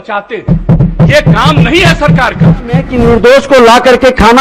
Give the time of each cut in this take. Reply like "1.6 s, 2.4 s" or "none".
2.9 s